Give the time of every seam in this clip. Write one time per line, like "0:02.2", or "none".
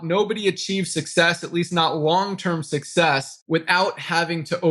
none